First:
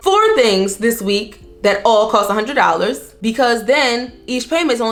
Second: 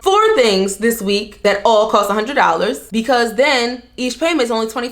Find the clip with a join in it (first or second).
second